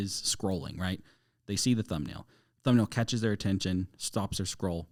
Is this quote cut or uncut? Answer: uncut